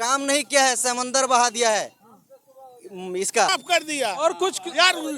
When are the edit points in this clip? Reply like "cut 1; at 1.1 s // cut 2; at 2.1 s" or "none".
cut 1; at 3.5 s